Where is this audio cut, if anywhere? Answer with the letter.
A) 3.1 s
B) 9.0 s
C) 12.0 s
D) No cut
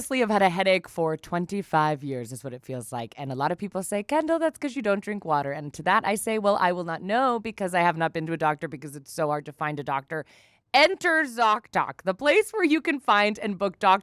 D